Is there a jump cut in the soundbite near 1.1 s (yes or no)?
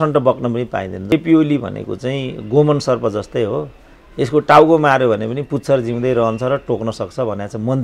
yes